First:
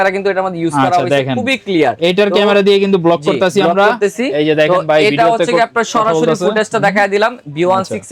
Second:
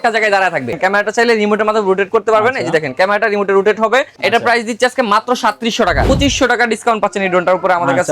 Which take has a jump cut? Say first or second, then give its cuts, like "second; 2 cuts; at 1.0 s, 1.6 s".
second; 3 cuts; at 0.8 s, 4.1 s, 6.1 s